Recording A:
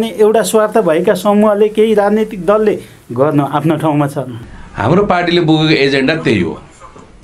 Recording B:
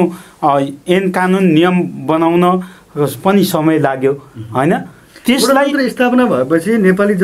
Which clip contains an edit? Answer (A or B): A